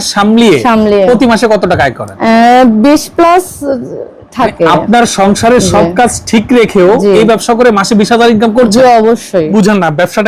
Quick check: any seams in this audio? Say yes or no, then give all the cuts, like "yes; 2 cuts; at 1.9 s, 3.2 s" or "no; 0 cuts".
yes; 2 cuts; at 2.1 s, 9.5 s